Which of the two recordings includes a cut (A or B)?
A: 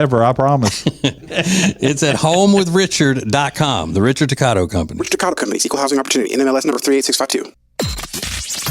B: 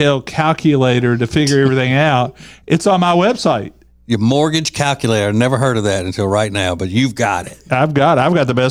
A